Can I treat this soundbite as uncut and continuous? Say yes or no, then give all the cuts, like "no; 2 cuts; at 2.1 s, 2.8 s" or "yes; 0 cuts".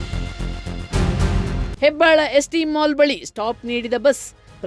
no; 1 cut; at 1.7 s